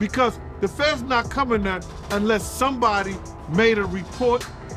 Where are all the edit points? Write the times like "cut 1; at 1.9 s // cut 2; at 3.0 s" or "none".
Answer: none